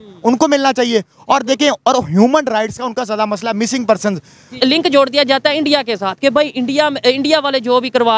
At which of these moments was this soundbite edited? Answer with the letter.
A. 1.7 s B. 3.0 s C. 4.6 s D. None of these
C